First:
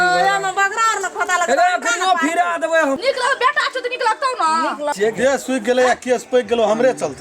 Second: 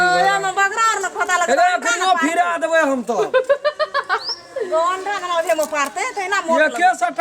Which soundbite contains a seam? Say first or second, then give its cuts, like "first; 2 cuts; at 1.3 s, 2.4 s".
first; 2 cuts; at 3.0 s, 4.9 s